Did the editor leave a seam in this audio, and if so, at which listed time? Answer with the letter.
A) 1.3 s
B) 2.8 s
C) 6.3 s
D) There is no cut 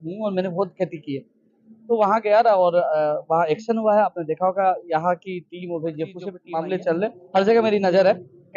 C